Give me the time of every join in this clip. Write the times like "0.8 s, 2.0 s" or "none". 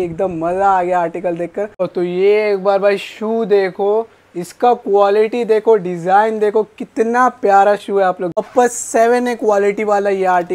1.9 s, 8.4 s